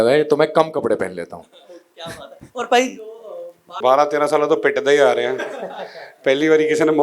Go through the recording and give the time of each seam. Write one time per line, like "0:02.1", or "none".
0:03.7